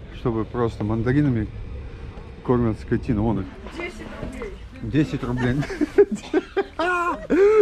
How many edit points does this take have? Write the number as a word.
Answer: one